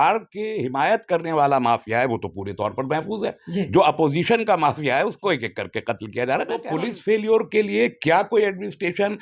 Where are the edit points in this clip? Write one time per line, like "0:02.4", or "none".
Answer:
0:06.7